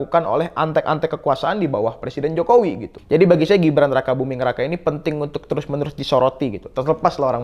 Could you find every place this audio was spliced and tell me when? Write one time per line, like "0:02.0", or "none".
0:02.9